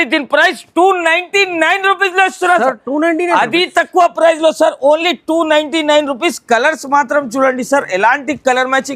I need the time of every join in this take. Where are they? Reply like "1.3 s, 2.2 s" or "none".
none